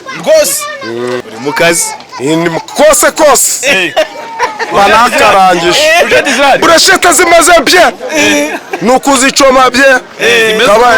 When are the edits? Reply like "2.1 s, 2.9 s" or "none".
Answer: 1.2 s